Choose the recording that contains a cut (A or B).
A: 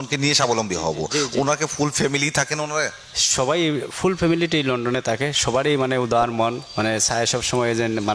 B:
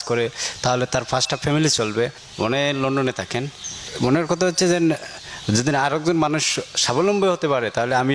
B